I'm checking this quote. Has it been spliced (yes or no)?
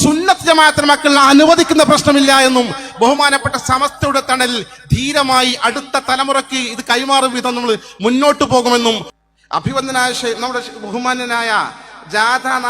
yes